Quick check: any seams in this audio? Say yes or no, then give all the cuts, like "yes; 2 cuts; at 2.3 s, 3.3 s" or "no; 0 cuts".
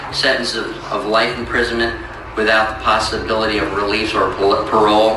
no; 0 cuts